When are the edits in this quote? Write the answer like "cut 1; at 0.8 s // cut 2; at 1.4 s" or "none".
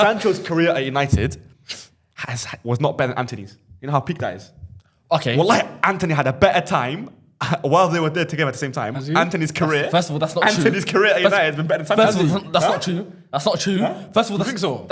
none